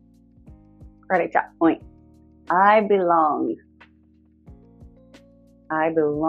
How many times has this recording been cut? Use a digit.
3